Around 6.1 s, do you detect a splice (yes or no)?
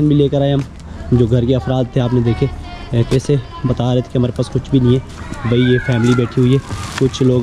no